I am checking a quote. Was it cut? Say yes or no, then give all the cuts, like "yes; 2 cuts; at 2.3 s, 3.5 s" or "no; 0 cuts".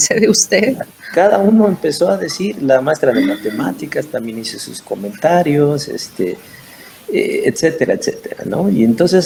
no; 0 cuts